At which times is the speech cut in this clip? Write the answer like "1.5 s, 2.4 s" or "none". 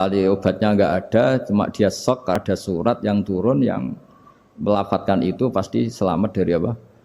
2.4 s